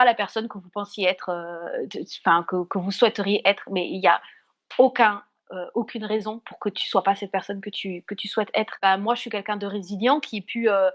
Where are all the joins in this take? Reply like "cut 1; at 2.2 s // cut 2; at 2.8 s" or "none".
cut 1; at 8.7 s

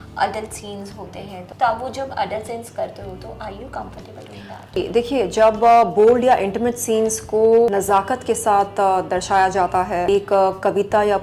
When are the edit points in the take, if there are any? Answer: cut 1; at 1.4 s // cut 2; at 4.8 s // cut 3; at 7.7 s // cut 4; at 10.1 s

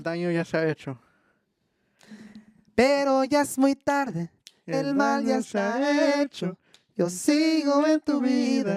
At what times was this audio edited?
none

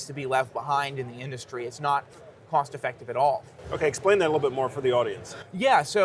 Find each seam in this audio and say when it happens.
none

